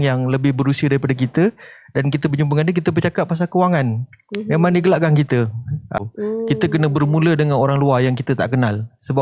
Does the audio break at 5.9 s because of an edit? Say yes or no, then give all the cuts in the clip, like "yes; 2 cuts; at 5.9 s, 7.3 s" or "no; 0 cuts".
yes; 1 cut; at 5.9 s